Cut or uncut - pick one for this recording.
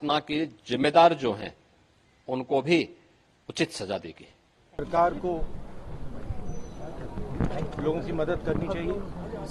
uncut